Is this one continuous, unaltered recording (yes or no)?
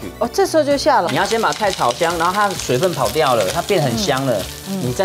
no